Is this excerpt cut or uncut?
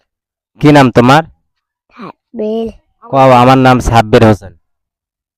uncut